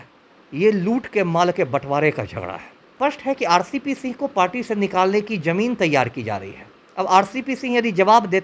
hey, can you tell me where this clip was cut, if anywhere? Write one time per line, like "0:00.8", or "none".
0:02.9